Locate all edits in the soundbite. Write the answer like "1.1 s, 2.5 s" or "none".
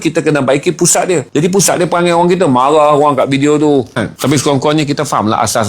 4.1 s